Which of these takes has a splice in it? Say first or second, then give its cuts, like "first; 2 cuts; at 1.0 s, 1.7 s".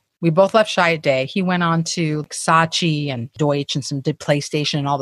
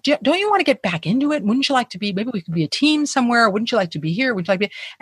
first; 2 cuts; at 2.2 s, 3.3 s